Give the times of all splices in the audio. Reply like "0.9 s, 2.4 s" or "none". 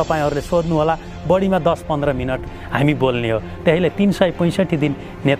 none

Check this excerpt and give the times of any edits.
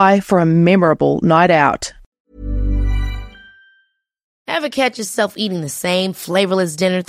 2.2 s, 4.2 s

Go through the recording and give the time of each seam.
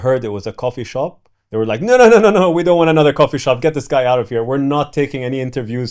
none

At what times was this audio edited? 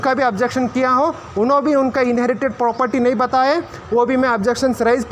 none

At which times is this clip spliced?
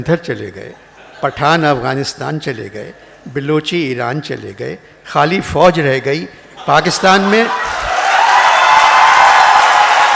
none

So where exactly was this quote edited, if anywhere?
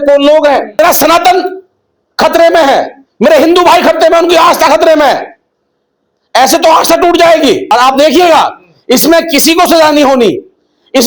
0.8 s, 7.6 s

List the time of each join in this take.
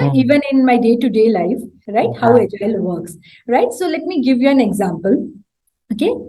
none

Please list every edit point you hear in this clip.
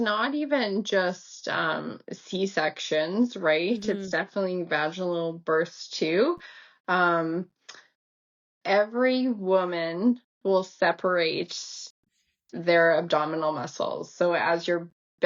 none

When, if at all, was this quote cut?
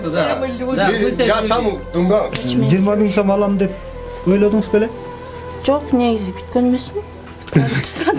2.4 s

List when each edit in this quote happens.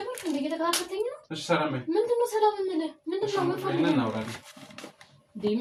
none

